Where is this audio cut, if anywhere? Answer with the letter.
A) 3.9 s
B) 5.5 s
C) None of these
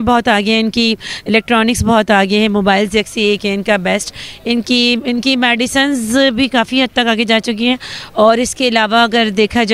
C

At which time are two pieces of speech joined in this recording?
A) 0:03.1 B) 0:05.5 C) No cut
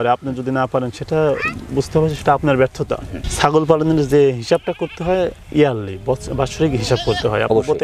A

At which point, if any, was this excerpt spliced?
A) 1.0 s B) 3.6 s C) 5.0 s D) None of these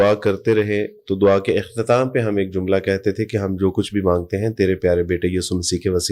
D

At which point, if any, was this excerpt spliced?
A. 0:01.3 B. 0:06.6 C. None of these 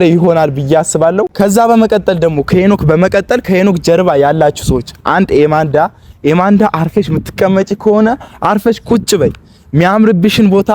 A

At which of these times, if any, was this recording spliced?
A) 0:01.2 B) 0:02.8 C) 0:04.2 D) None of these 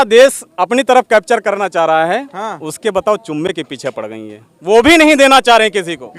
D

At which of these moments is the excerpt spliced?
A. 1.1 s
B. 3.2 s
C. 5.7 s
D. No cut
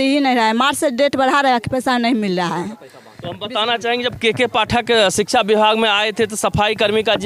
D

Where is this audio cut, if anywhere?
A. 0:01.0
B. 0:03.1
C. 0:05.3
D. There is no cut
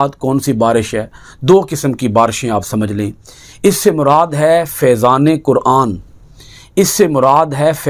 D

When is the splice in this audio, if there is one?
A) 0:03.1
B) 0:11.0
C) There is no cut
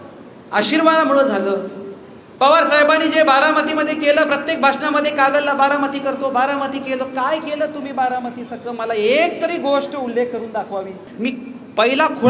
B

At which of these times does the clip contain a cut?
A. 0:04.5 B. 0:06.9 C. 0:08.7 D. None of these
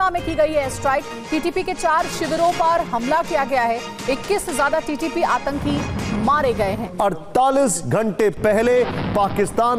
B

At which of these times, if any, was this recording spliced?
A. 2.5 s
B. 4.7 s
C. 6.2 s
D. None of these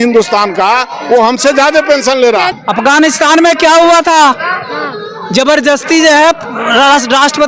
A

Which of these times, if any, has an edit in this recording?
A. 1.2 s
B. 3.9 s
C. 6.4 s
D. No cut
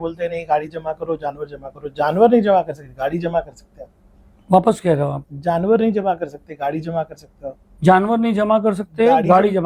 D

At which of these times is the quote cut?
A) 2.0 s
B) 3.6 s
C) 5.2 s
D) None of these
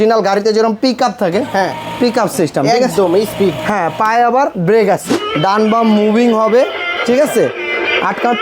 C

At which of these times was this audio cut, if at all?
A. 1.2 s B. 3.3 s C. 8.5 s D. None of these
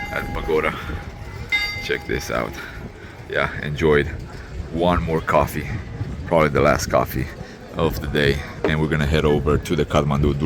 D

